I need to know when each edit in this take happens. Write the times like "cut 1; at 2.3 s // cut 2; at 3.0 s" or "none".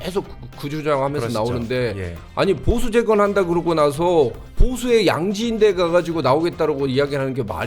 cut 1; at 4.5 s

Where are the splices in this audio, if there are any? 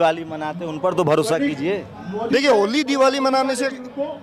none

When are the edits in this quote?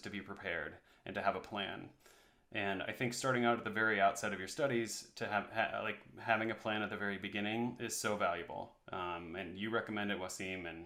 none

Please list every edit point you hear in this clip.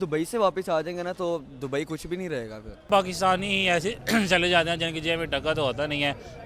cut 1; at 2.9 s

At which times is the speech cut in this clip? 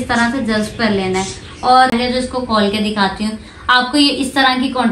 cut 1; at 1.9 s

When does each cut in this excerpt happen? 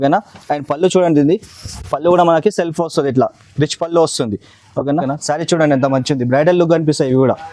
cut 1; at 5.1 s

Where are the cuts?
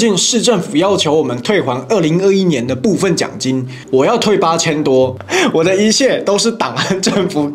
cut 1; at 3.8 s // cut 2; at 5.2 s

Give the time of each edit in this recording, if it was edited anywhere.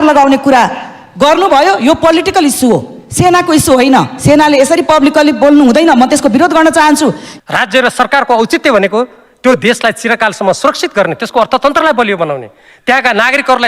cut 1; at 7.3 s

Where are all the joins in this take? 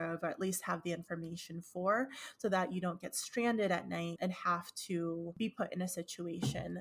none

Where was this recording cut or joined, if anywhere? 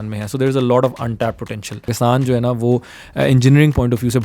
cut 1; at 1.9 s

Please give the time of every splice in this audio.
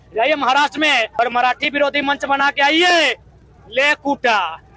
cut 1; at 1.1 s

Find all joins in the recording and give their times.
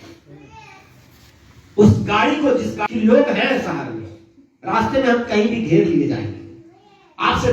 cut 1; at 2.8 s

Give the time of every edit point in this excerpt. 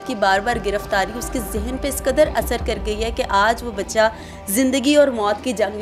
none

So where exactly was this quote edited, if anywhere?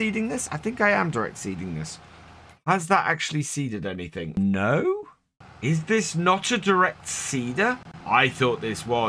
cut 1; at 4.4 s // cut 2; at 7.9 s

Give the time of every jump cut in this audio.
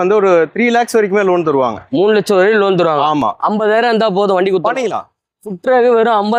none

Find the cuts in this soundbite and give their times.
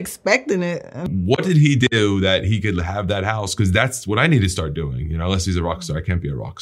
cut 1; at 1.1 s

